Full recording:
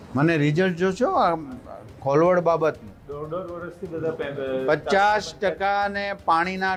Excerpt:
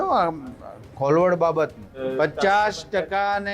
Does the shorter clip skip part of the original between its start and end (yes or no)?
yes